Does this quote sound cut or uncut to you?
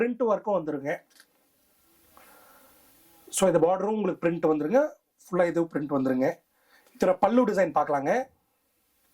uncut